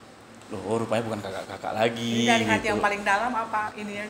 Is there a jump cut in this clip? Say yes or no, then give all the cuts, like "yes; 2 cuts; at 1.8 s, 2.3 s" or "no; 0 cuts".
no; 0 cuts